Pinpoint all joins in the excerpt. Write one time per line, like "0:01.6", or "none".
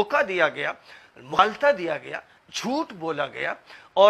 0:01.3

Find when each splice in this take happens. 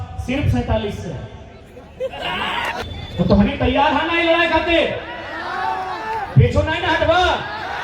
0:02.8

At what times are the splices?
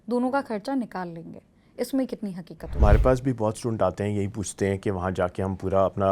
0:02.7

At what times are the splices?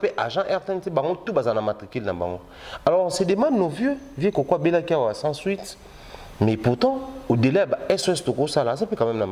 none

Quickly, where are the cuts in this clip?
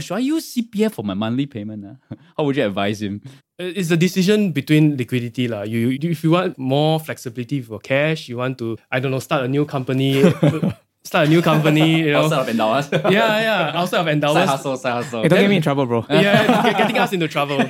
0:06.5
0:10.2

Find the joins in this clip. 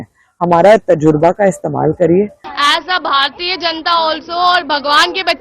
0:02.5

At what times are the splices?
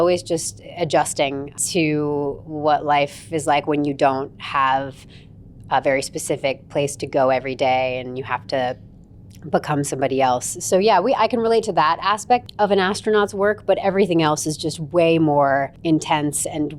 0:01.5
0:12.4
0:15.7

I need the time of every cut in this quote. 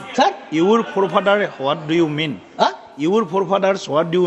none

